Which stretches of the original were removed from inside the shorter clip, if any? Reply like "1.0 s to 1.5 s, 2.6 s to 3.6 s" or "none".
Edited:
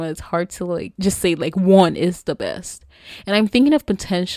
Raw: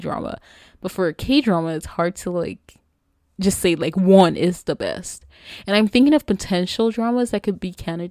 2.6 s to 3.3 s